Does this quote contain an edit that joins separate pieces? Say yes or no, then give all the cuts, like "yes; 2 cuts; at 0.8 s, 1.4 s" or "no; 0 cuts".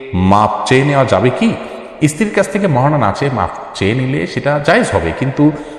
no; 0 cuts